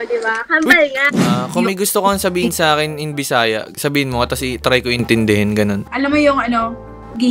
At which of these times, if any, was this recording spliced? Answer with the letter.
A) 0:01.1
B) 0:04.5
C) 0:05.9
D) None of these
A